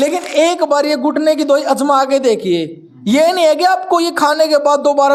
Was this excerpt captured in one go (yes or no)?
yes